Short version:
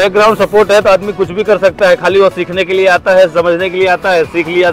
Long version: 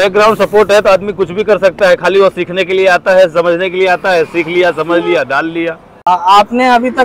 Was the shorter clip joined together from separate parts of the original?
no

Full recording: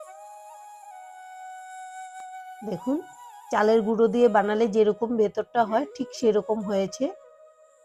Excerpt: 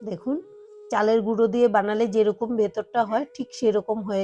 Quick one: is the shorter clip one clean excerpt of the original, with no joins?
yes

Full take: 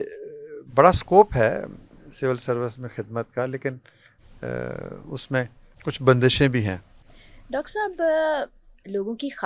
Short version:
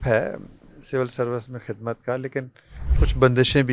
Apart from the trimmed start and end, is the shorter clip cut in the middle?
yes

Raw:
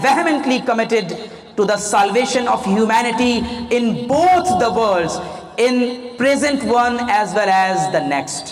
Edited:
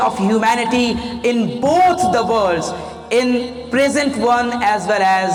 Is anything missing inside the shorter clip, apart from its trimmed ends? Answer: no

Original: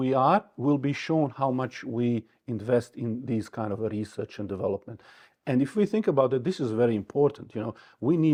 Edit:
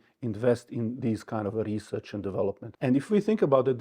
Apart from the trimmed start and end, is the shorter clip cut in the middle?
yes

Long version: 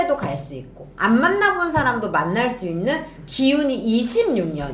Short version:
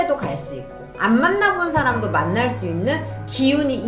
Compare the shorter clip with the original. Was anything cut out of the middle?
no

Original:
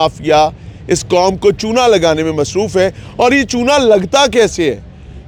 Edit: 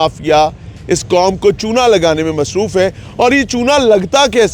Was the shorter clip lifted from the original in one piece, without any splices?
yes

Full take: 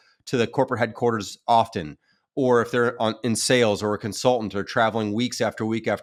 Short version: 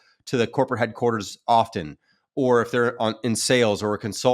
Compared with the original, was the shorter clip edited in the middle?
no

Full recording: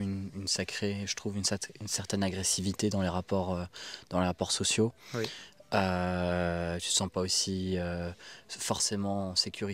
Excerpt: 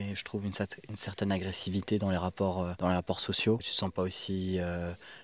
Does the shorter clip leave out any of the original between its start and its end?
yes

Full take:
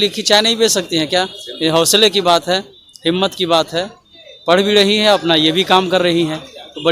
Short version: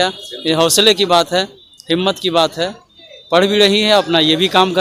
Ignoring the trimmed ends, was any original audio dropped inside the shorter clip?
no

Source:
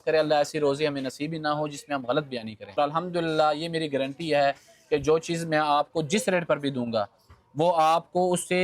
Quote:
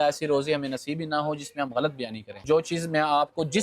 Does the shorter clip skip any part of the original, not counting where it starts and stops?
yes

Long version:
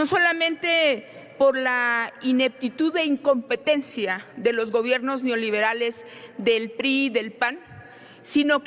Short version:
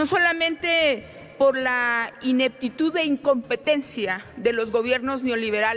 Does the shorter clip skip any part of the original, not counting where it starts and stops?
no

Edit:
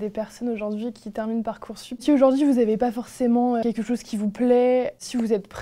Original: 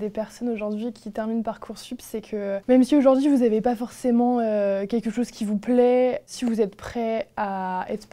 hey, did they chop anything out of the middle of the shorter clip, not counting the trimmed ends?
yes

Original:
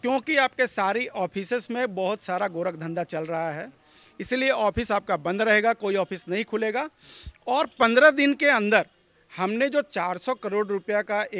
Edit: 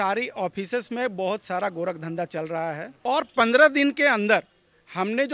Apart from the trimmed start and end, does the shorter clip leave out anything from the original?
yes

